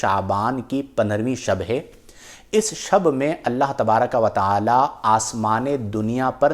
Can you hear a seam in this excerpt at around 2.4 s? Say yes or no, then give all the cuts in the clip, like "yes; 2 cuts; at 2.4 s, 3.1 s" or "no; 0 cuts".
no; 0 cuts